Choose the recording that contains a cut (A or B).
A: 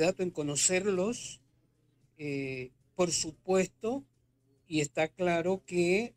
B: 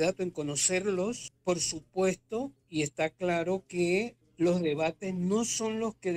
B